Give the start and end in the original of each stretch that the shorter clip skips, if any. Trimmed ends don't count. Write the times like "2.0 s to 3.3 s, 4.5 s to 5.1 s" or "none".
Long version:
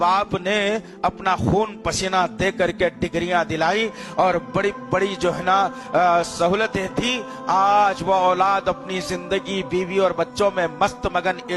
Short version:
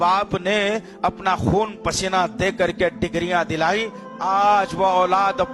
4.0 s to 7.3 s

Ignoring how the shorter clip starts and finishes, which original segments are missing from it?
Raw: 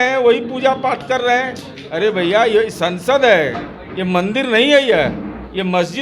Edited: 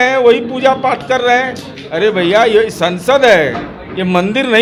none

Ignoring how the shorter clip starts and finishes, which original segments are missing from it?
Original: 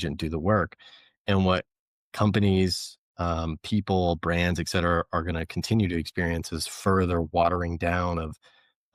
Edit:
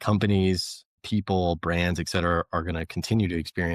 3.1 s to 3.5 s

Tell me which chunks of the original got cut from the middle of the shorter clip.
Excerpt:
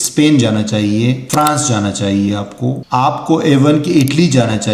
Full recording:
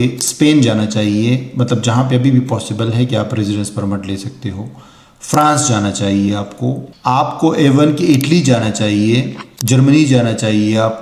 1.5 s to 5.2 s, 6.8 s to 6.9 s

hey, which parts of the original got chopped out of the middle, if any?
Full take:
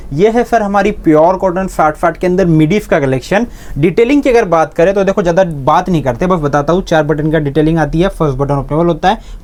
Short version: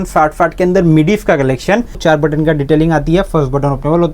3.6 s to 6.8 s

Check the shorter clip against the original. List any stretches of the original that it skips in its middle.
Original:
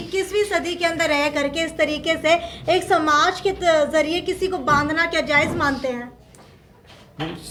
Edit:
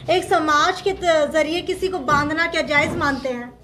none

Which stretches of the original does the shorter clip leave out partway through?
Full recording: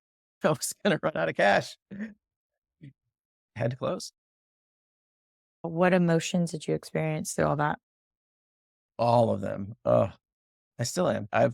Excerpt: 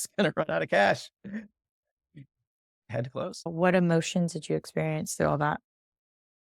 4.0 s to 5.6 s

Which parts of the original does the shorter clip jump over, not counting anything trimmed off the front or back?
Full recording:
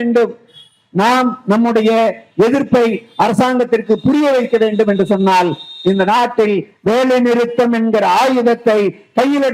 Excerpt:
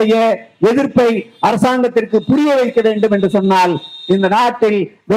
none

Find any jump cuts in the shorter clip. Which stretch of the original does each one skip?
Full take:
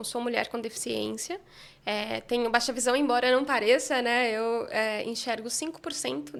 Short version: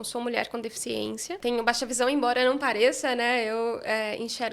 1.4 s to 2.2 s

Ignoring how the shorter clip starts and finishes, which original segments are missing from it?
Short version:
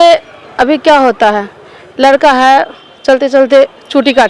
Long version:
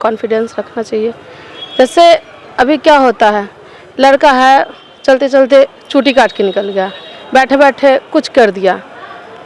none

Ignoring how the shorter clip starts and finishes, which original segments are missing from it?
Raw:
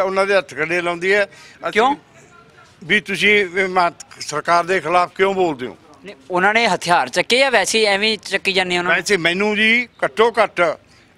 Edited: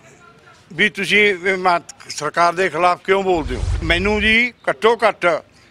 6.0 s to 9.2 s

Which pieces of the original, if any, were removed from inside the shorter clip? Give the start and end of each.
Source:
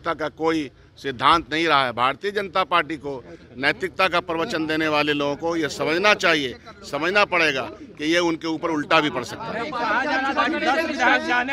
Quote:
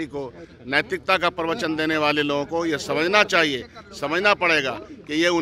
none

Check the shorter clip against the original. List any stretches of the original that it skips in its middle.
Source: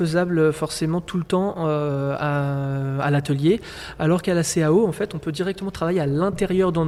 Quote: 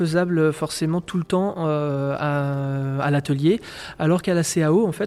none

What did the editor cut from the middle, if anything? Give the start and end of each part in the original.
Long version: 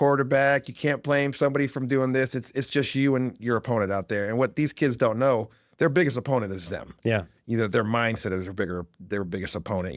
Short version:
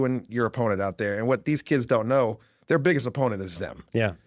none

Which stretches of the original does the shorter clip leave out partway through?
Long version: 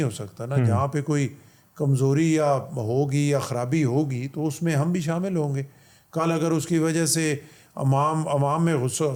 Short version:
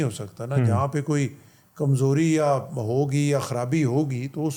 none

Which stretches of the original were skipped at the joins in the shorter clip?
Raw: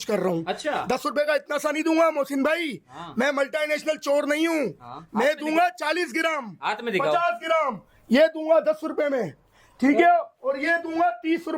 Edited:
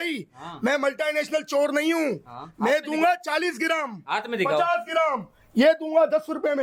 none

